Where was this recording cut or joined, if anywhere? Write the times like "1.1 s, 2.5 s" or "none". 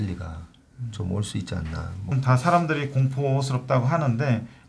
2.1 s